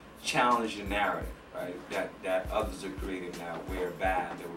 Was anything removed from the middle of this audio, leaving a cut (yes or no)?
no